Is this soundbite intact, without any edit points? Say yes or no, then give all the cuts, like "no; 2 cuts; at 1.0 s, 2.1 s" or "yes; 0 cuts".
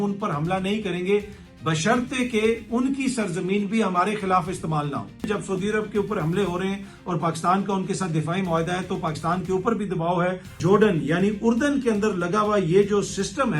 no; 2 cuts; at 5.3 s, 10.6 s